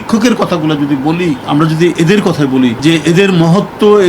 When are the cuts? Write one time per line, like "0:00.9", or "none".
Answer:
0:01.4
0:02.8